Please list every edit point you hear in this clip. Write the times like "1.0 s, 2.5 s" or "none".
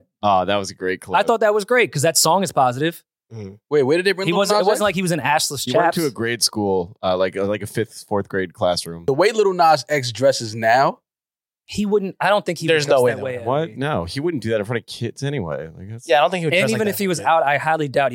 8.9 s